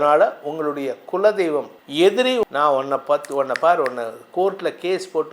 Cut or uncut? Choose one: cut